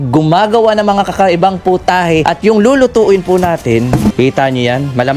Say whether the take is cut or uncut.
cut